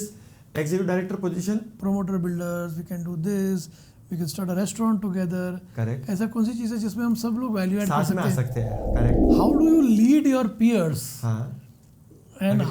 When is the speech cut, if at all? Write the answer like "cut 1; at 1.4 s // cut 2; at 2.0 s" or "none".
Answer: cut 1; at 1.7 s // cut 2; at 9.2 s